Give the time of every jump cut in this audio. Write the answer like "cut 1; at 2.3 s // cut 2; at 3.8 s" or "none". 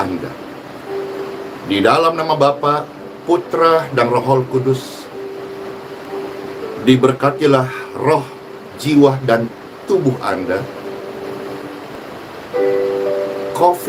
none